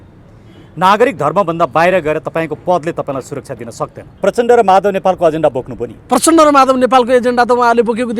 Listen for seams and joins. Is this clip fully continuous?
no; 1 cut; at 4.2 s

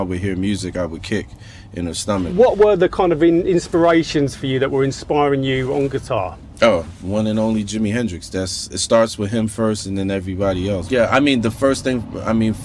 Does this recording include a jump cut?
yes; 2 cuts; at 2.3 s, 10.8 s

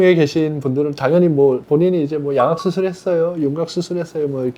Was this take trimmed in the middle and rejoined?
no; 0 cuts

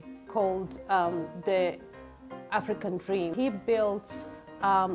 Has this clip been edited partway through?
yes; 1 cut; at 3.3 s

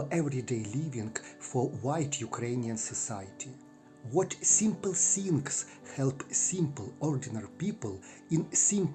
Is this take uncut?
yes; 0 cuts

